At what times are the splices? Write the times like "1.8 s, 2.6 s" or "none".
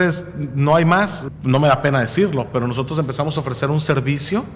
1.2 s